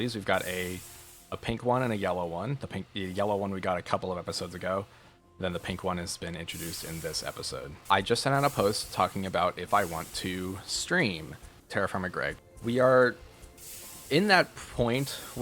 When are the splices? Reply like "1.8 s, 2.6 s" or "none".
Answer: 7.7 s, 12.4 s